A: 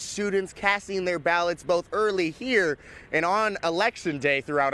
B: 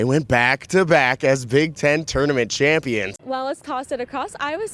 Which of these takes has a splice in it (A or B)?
B